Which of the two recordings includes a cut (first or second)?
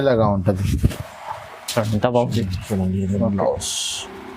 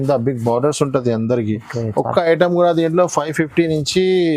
first